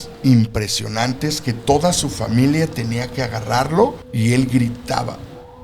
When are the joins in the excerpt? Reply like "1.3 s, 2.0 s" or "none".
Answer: 4.0 s